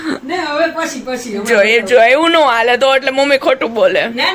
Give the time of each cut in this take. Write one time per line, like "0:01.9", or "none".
none

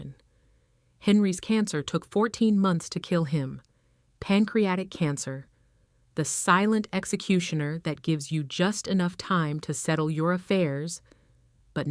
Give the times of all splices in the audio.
none

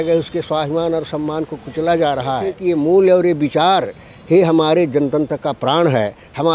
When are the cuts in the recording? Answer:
0:02.6

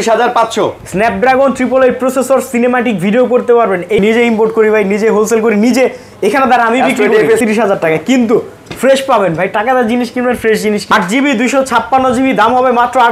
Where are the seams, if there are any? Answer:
0:04.0
0:07.4
0:10.8

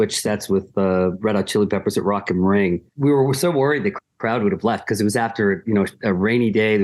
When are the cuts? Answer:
0:02.9

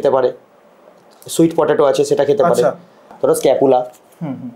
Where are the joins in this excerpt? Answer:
0:03.1

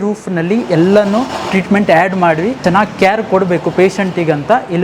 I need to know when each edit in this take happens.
0:02.6

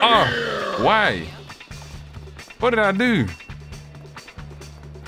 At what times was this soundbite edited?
none

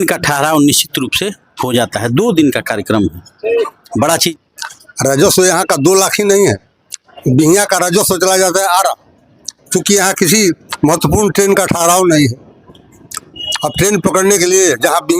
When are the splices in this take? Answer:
0:04.3

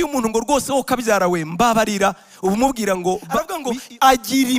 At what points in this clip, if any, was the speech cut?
0:03.6

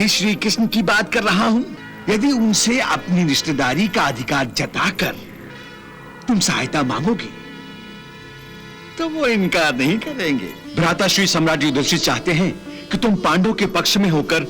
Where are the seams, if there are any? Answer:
0:01.8
0:10.6

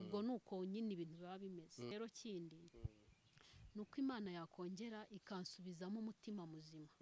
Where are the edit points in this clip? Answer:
0:01.9

